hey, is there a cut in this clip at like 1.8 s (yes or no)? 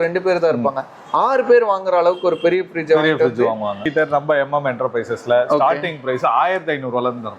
no